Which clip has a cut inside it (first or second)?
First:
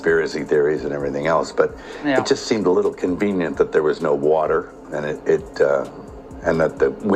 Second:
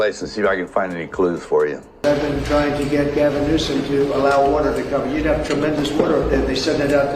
second